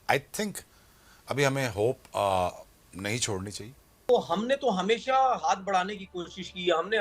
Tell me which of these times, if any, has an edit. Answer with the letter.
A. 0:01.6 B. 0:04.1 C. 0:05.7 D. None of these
B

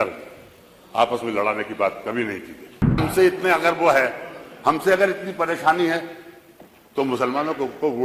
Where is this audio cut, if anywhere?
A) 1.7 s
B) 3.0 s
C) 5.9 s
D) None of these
B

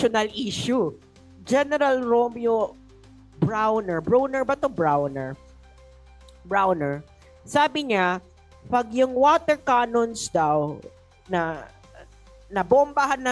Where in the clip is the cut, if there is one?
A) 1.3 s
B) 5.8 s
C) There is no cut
A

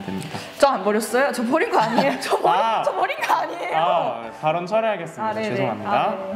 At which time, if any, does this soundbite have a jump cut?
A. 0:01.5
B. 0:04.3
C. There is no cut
C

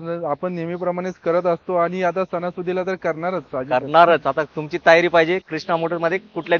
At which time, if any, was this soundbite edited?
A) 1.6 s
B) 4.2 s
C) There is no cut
C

